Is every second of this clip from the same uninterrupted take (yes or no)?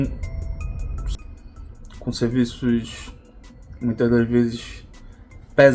no